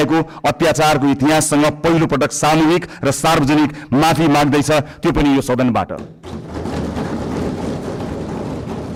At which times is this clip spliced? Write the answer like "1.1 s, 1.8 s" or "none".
none